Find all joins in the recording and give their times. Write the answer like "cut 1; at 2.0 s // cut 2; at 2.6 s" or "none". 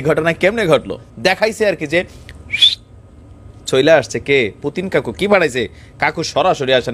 cut 1; at 1.1 s